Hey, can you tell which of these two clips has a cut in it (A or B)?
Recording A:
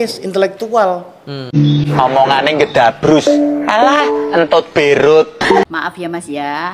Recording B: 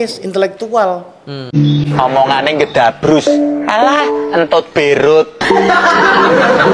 A